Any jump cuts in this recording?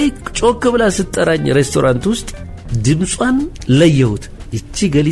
yes; 1 cut; at 3.5 s

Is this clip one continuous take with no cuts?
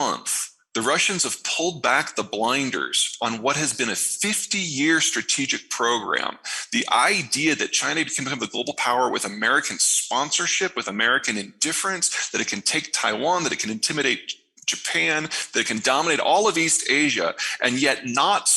yes; 0 cuts

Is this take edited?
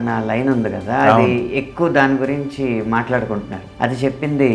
yes; 1 cut; at 3.6 s

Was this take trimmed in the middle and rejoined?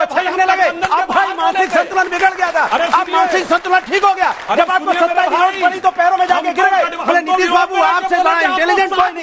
no; 0 cuts

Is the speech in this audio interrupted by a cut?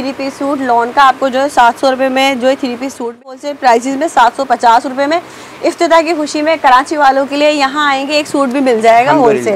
yes; 1 cut; at 3.2 s

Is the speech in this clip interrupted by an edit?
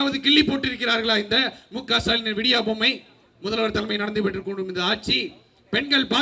no; 0 cuts

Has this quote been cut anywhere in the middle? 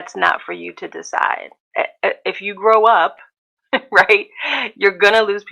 yes; 1 cut; at 1.6 s

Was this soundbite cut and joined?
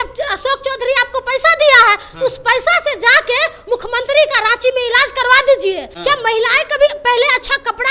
yes; 1 cut; at 5.9 s

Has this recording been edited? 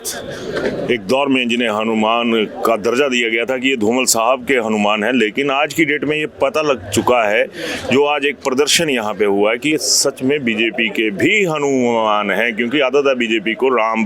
no; 0 cuts

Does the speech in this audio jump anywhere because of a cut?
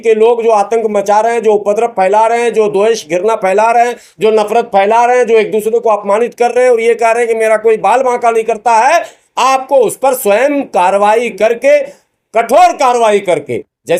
no; 0 cuts

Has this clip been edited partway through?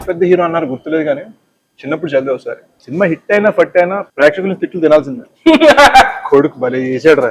yes; 2 cuts; at 2.7 s, 4.0 s

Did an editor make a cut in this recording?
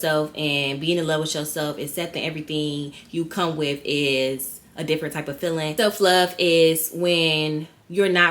yes; 1 cut; at 5.7 s

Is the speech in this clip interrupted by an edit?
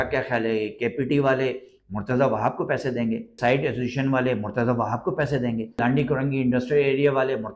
yes; 2 cuts; at 3.3 s, 5.8 s

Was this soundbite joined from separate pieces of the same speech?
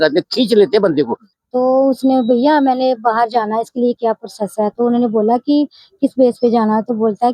yes; 1 cut; at 1.2 s

